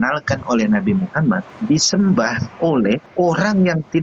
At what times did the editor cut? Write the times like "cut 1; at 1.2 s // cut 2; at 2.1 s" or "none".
cut 1; at 1.5 s // cut 2; at 3.1 s

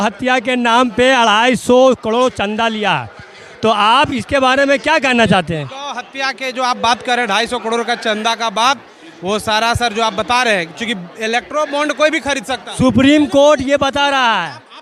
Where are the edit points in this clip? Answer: none

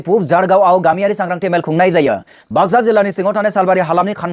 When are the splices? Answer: cut 1; at 2.3 s

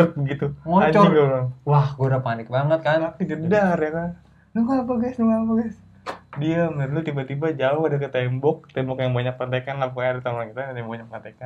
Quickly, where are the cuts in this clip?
cut 1; at 3.0 s

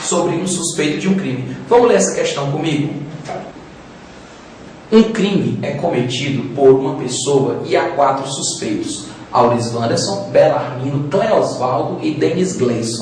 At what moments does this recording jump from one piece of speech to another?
cut 1; at 7.1 s

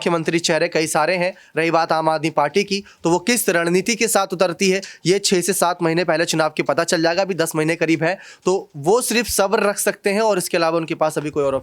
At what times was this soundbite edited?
none

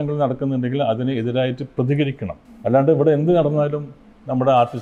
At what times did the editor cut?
none

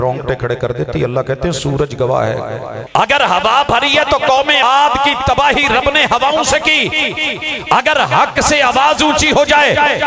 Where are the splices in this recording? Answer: cut 1; at 2.7 s // cut 2; at 4.6 s

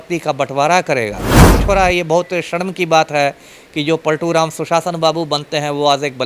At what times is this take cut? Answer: cut 1; at 1.6 s

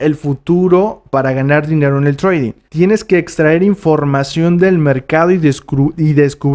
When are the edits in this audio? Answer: cut 1; at 2.6 s

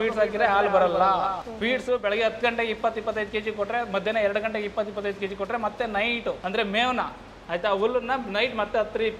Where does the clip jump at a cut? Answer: cut 1; at 6.4 s

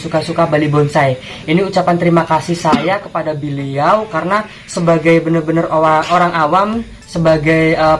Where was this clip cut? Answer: none

